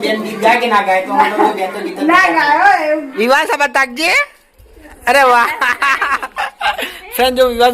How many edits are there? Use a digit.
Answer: 1